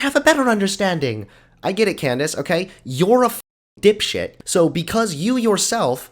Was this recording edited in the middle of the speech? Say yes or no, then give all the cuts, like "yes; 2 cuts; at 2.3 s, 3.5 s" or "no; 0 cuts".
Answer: yes; 1 cut; at 4.2 s